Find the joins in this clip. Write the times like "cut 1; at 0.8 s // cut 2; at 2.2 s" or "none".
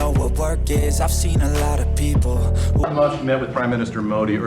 cut 1; at 2.8 s